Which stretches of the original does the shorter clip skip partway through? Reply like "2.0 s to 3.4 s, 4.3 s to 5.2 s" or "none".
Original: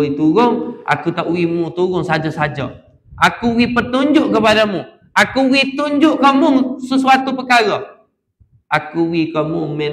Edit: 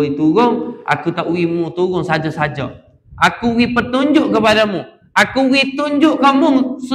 none